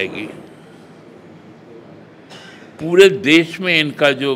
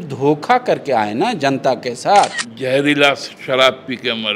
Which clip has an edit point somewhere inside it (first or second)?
second